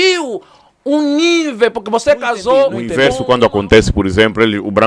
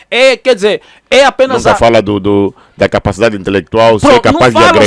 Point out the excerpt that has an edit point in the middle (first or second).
first